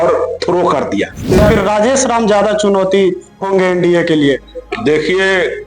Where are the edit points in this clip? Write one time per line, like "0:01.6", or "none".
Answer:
0:01.4